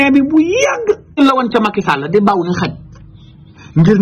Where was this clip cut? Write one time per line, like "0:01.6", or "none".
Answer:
0:01.2